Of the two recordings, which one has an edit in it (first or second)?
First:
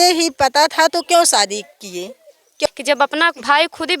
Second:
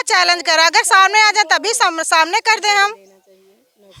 first